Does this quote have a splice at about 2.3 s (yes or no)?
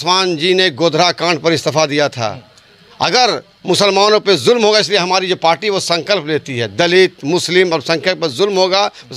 no